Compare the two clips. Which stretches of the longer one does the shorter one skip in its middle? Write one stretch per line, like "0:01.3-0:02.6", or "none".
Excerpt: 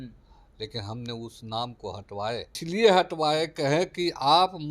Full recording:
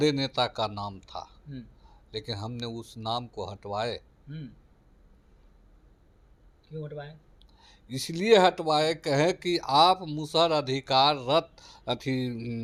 0:04.1-0:08.0